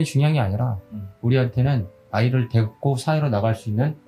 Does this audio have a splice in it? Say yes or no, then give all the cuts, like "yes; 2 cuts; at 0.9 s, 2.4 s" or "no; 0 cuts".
no; 0 cuts